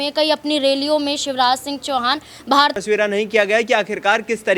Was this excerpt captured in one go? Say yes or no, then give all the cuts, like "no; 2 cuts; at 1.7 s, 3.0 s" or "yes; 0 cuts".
no; 1 cut; at 2.8 s